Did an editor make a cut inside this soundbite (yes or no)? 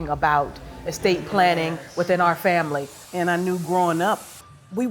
yes